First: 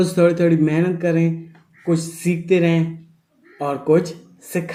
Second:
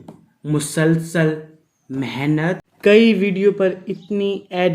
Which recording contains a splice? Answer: second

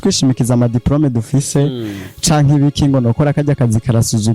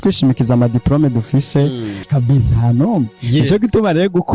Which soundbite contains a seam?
second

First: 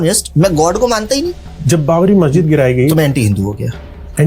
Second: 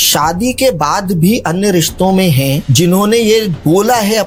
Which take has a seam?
first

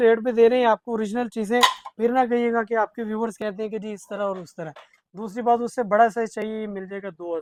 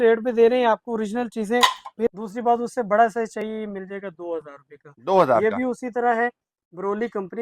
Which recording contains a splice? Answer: second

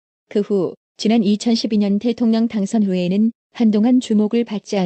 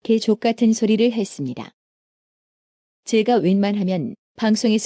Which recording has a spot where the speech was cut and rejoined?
first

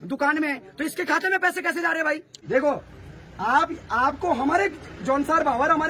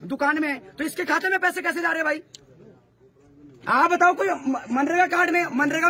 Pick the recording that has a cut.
first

